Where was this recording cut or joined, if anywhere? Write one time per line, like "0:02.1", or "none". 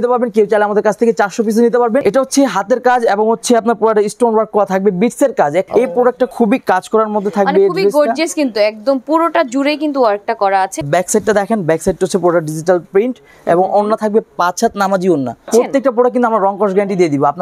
0:02.0
0:05.7
0:10.9
0:15.5